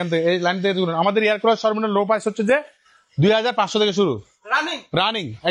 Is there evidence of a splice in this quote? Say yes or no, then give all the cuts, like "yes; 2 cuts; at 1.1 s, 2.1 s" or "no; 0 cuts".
no; 0 cuts